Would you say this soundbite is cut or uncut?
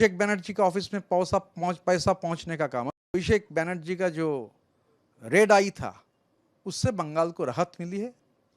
cut